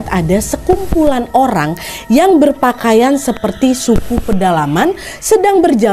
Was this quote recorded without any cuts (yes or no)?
yes